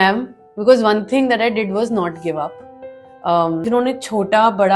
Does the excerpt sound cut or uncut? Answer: cut